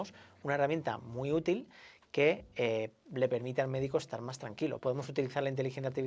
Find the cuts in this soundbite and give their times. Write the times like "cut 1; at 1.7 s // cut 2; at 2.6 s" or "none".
cut 1; at 4.8 s